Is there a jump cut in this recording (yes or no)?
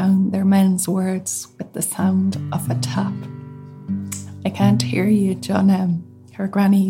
no